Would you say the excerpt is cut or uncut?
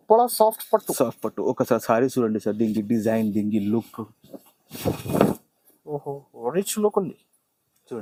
uncut